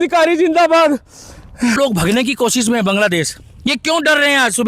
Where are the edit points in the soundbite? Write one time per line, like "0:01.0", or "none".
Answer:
0:01.8